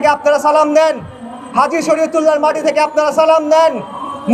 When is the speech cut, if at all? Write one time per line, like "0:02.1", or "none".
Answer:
none